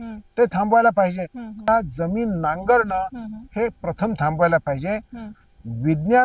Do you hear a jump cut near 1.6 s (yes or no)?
yes